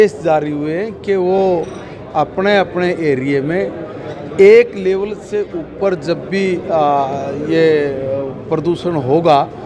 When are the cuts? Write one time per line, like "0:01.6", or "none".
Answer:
none